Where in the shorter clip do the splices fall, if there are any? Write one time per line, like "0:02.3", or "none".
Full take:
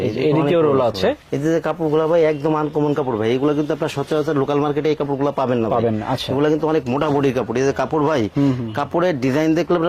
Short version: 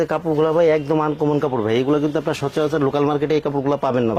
none

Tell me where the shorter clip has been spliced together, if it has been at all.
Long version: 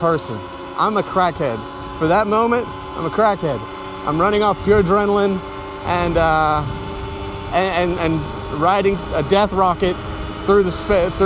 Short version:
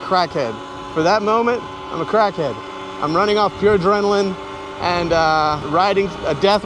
0:05.6

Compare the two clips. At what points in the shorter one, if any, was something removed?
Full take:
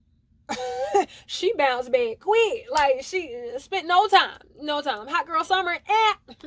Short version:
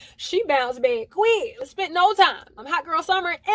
0:01.5
0:02.6

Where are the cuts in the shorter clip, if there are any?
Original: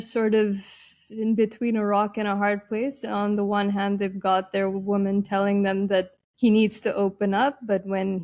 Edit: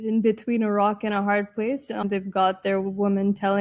0:02.0

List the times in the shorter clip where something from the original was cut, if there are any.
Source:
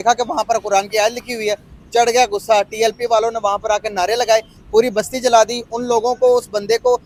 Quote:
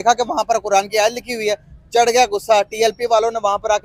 none

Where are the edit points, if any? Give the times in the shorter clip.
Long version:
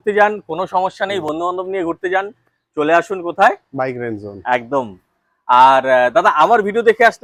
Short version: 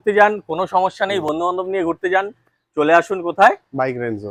none

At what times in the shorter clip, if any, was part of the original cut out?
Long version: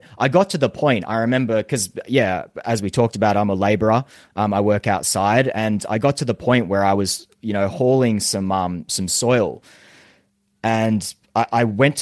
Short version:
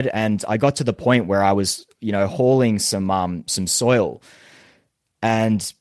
none

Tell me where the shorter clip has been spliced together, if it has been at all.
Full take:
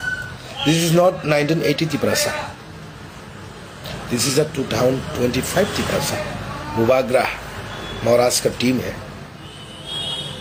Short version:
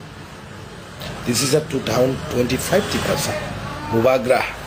none

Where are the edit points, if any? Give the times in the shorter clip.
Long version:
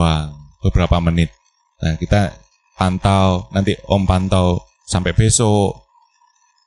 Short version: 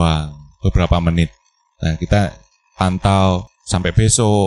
0:03.5

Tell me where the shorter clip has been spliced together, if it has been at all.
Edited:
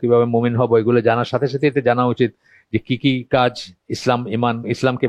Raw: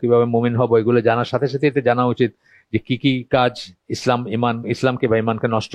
none

